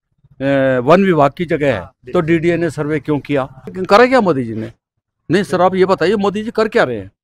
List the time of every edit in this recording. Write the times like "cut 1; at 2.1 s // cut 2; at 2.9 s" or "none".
cut 1; at 3.8 s